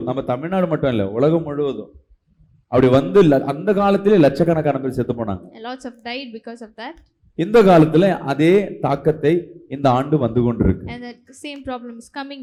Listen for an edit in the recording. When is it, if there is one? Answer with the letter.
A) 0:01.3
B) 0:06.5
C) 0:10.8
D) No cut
D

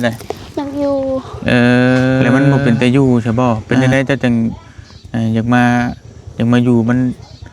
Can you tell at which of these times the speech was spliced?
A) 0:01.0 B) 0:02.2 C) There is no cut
B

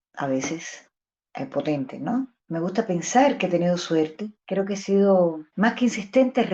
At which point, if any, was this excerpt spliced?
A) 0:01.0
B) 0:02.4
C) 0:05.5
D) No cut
D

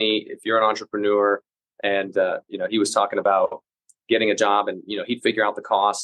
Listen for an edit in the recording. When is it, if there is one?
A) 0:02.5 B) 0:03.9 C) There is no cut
C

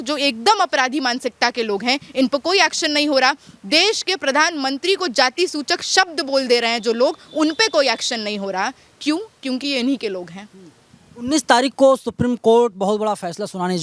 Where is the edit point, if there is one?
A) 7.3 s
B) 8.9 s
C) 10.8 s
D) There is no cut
D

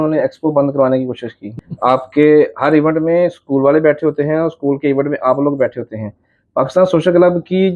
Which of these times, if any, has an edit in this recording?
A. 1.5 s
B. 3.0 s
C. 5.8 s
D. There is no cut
A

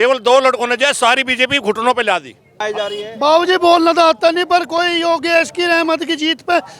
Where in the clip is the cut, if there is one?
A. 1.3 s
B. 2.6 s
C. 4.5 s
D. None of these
B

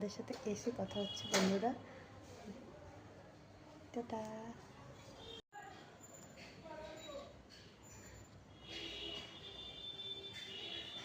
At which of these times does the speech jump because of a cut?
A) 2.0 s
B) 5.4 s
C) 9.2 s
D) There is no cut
B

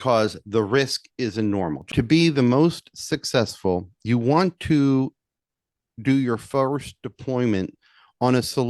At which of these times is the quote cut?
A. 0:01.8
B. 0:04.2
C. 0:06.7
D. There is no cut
A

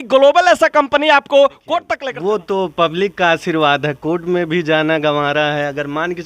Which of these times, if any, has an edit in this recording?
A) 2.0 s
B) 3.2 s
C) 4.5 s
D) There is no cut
A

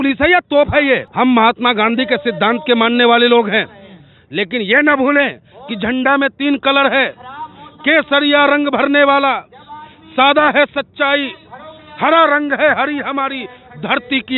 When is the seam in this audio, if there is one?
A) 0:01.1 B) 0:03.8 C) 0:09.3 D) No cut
A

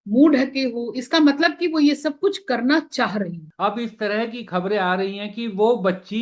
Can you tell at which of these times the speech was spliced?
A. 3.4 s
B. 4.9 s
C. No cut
A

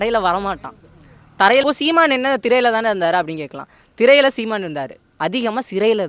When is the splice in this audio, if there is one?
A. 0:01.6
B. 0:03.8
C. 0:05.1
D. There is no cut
A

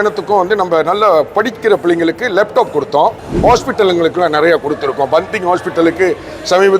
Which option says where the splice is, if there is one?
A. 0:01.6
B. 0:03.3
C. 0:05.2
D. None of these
B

